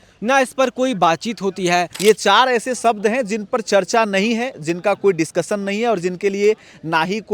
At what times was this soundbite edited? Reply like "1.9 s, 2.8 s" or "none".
1.9 s